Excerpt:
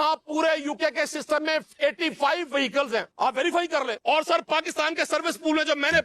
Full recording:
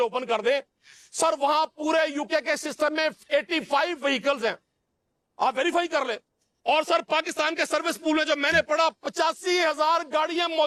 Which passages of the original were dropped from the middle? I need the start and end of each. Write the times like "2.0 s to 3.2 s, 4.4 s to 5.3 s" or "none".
4.6 s to 5.3 s, 6.2 s to 6.6 s